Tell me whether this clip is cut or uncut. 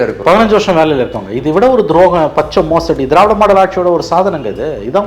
uncut